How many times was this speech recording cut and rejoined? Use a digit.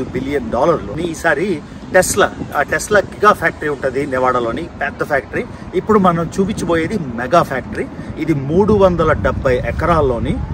1